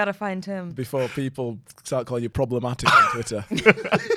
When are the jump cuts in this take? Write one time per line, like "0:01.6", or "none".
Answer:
0:02.3